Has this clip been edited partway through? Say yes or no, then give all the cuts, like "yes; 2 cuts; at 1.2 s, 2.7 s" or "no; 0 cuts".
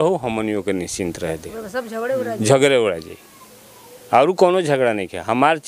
no; 0 cuts